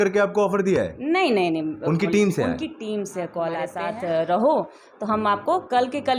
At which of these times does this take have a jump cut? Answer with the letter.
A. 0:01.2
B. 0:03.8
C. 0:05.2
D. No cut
B